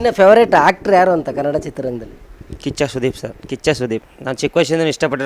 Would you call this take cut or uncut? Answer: cut